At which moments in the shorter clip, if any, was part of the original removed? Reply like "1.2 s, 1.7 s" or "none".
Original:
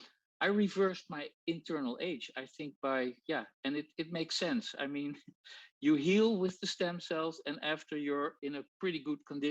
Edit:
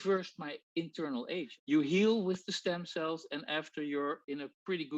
1.5 s